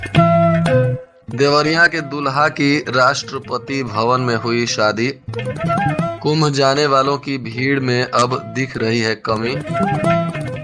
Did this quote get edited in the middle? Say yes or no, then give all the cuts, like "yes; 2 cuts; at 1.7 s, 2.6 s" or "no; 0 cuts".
yes; 1 cut; at 1.1 s